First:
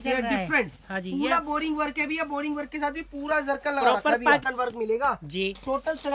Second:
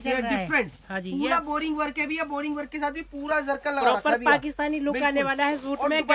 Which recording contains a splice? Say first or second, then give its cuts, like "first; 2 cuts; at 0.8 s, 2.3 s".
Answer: first; 1 cut; at 4.5 s